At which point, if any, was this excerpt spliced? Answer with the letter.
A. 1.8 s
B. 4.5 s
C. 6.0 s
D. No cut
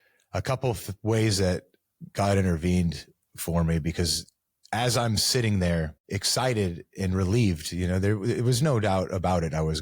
C